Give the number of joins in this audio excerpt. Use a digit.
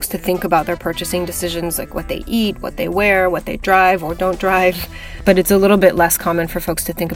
0